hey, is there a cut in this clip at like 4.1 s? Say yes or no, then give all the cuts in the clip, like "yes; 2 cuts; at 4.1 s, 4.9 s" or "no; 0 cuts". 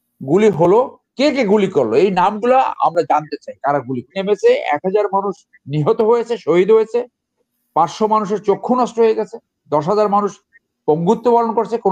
yes; 1 cut; at 4.1 s